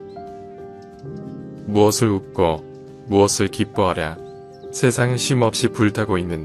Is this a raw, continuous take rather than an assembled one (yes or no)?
no